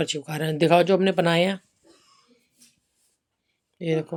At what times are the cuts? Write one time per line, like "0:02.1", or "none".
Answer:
none